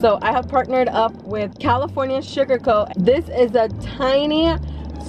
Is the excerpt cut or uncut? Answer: cut